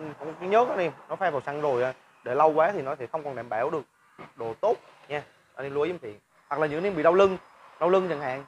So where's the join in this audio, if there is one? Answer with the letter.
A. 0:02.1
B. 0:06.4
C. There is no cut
B